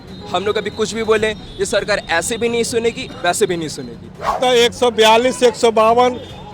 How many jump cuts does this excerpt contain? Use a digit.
1